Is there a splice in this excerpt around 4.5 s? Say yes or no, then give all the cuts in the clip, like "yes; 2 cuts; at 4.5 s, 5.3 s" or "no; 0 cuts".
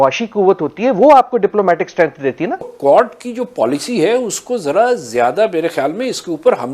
no; 1 cut; at 2.7 s